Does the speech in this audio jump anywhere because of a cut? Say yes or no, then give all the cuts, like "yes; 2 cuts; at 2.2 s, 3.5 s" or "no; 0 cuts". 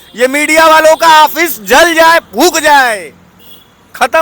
no; 0 cuts